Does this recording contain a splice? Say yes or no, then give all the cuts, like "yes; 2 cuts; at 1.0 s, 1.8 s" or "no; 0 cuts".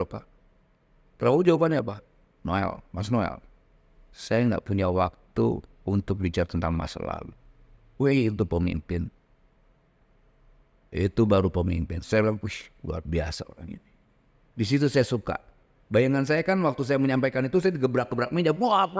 no; 0 cuts